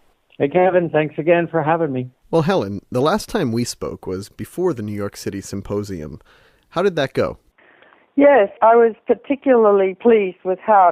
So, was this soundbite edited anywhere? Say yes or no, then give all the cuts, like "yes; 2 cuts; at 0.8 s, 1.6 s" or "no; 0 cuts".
yes; 1 cut; at 6.8 s